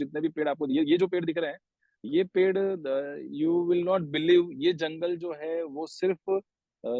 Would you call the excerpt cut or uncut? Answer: uncut